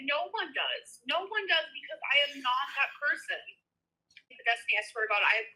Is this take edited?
yes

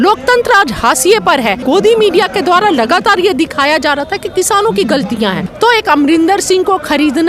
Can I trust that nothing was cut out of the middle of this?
no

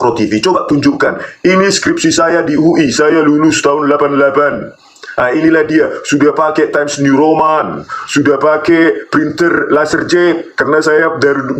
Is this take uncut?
yes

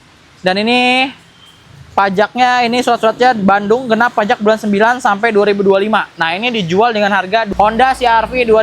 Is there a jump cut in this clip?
yes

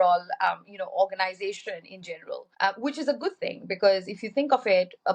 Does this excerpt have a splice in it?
yes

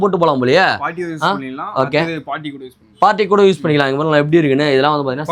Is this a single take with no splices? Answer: yes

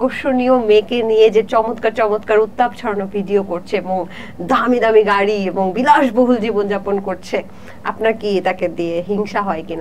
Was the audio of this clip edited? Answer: no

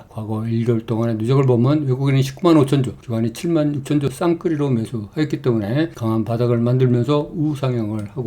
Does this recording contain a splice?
yes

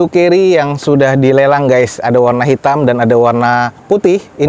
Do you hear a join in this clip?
no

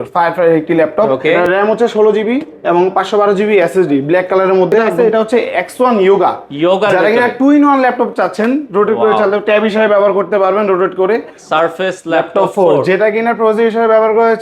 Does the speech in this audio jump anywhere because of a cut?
yes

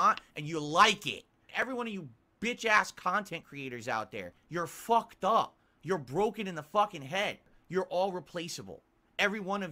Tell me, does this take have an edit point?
yes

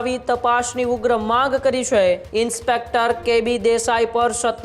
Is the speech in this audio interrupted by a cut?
yes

